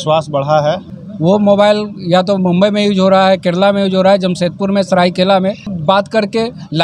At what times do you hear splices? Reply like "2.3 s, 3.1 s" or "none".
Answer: 0.9 s, 5.7 s